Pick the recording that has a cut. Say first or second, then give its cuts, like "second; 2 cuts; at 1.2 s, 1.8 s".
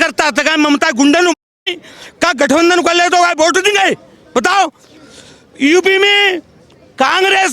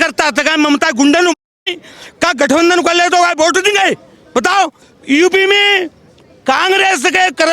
second; 1 cut; at 4.9 s